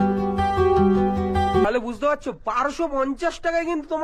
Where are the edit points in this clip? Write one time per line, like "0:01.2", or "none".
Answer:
0:01.6